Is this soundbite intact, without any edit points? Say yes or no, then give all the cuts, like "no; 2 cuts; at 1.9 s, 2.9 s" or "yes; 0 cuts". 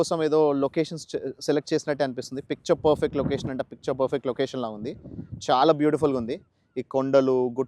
yes; 0 cuts